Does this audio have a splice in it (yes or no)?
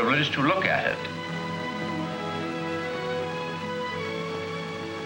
yes